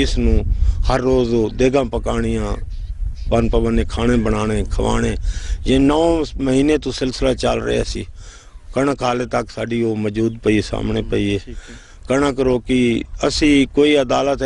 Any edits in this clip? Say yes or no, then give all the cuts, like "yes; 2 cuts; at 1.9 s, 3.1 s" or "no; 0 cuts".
no; 0 cuts